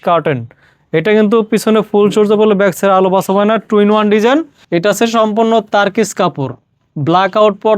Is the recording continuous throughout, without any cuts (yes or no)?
no